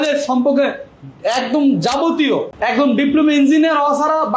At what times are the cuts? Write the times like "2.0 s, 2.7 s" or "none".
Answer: none